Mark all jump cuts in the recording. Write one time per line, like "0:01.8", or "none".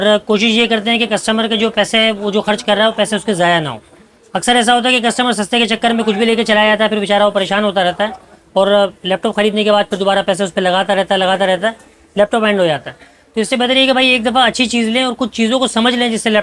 none